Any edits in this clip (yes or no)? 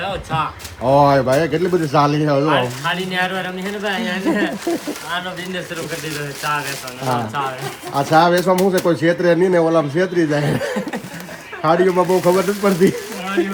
no